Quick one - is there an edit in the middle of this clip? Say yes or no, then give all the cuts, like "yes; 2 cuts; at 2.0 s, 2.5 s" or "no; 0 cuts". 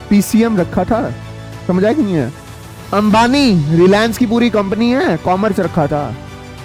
no; 0 cuts